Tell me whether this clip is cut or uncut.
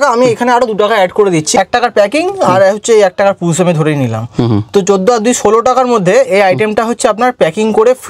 cut